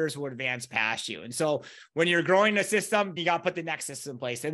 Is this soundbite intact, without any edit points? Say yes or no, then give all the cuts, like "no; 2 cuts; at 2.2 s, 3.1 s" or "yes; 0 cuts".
no; 1 cut; at 3.2 s